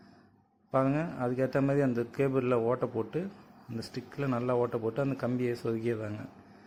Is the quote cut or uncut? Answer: uncut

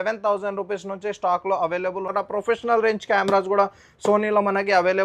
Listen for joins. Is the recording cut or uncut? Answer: cut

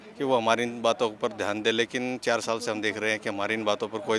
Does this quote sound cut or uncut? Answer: uncut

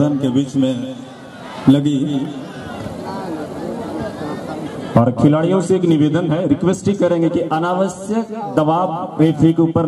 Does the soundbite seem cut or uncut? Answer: uncut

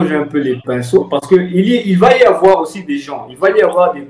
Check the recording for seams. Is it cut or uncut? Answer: uncut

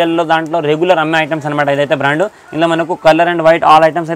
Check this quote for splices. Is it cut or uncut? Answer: uncut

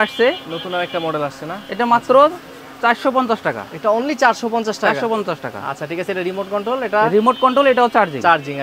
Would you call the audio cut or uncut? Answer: uncut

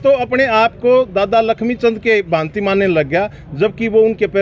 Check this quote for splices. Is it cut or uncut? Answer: uncut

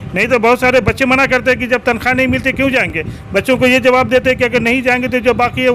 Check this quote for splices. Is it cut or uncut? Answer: uncut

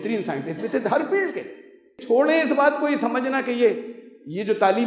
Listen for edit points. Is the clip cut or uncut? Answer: cut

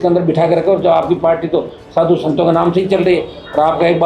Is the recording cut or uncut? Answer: uncut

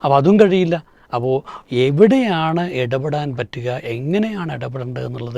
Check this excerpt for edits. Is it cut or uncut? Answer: uncut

